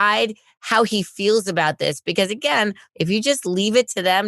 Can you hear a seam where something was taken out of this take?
yes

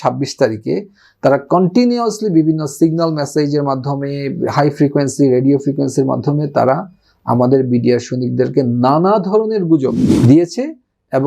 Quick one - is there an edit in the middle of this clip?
yes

